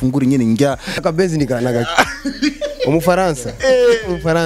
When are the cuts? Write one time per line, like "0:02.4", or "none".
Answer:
0:01.0
0:03.5